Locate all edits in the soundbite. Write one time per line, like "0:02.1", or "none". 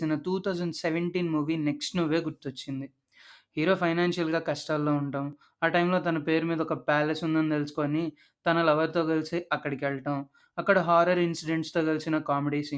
none

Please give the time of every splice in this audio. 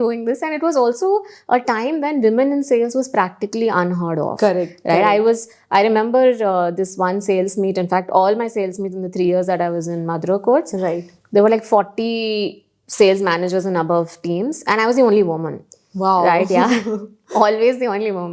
none

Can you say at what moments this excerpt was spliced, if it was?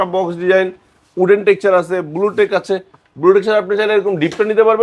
none

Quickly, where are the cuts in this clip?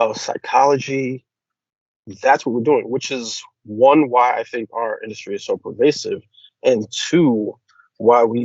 none

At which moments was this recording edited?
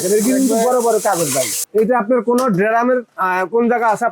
0:01.5

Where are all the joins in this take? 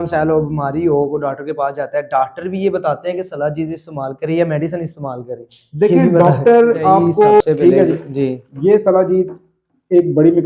0:07.4

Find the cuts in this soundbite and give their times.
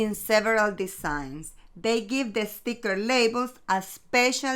none

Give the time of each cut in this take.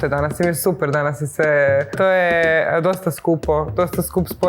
0:01.9

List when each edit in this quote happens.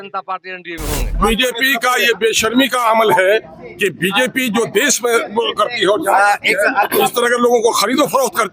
0:01.2

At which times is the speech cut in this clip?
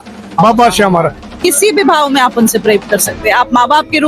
0:01.2

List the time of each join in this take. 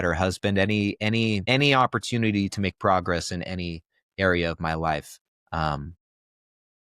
0:01.4

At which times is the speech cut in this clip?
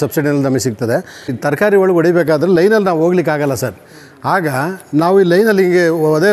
0:01.4

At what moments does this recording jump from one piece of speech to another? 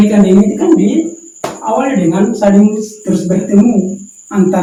none

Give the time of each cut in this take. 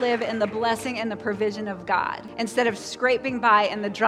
0:02.2

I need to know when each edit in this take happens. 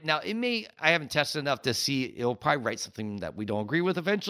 none

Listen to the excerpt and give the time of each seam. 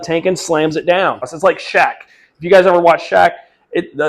0:01.3

